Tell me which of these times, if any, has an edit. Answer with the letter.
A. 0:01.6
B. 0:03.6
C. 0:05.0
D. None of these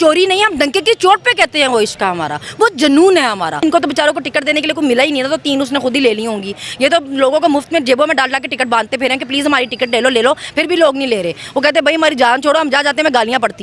B